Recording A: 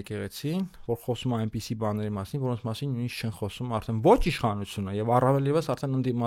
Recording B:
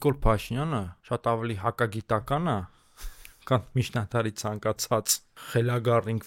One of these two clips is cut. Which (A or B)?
B